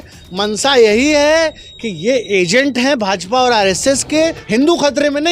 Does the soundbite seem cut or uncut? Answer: cut